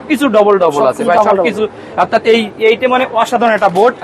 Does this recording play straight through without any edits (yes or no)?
yes